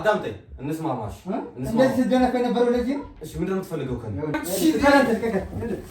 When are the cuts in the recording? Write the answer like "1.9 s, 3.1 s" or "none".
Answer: 4.3 s